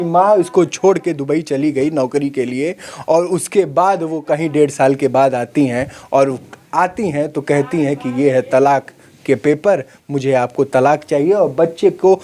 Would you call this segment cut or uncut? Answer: uncut